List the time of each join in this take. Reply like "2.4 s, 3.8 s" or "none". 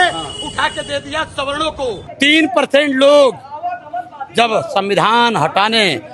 2.1 s